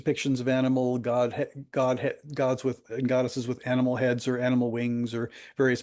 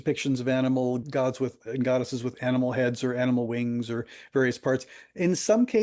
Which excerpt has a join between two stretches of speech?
second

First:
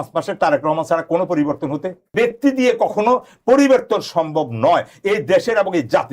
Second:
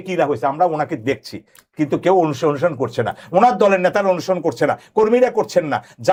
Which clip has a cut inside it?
first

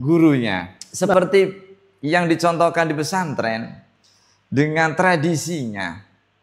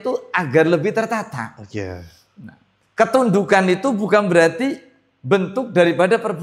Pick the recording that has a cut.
first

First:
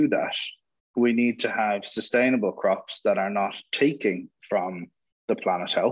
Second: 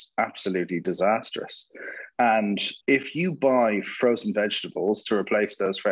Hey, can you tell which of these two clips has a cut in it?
second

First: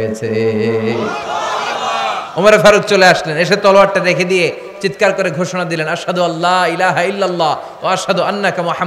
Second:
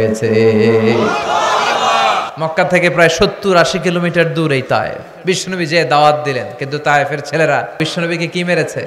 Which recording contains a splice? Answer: second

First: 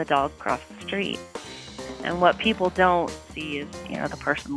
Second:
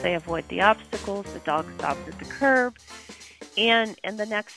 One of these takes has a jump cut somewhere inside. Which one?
first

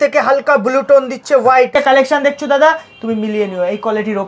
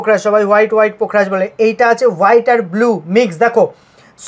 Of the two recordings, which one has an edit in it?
first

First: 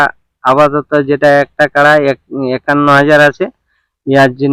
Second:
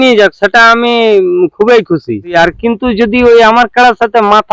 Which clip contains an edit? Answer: second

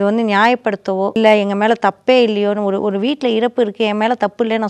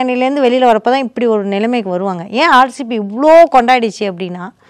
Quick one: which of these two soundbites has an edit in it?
first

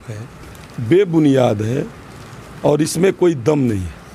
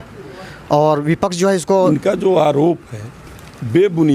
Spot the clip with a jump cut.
second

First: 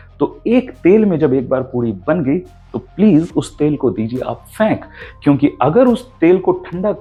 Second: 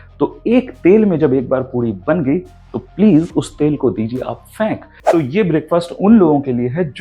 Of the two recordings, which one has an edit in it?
second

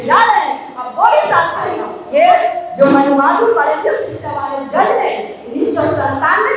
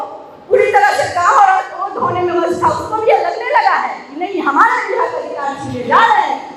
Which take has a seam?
first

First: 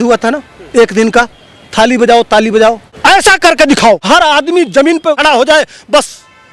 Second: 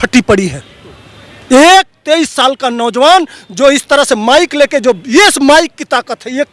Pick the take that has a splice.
first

